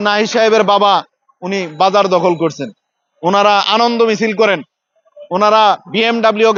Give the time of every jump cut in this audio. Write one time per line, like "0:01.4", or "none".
none

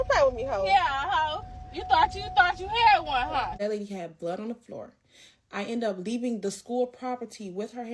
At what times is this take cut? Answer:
0:03.6

